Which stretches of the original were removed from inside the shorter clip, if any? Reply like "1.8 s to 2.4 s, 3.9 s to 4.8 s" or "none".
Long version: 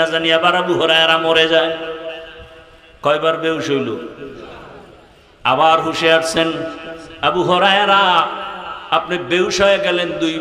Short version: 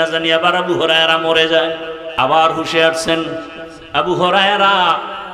2.0 s to 5.3 s